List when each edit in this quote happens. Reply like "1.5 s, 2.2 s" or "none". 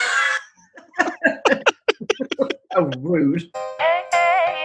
3.6 s